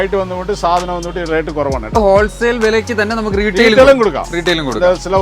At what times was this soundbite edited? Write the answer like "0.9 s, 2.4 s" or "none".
2.0 s